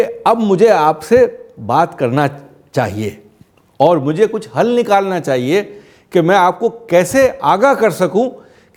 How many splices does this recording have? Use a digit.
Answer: 0